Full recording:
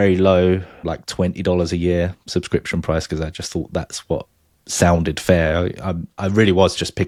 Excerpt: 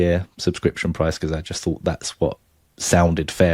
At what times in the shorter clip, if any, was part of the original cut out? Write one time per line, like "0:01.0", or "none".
none